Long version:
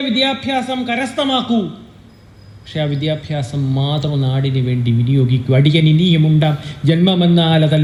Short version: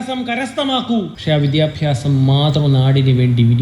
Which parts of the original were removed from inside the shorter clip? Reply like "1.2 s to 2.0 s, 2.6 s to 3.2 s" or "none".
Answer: 1.7 s to 2.6 s